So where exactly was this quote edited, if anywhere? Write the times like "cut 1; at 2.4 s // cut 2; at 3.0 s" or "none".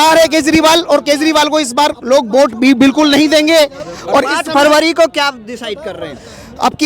none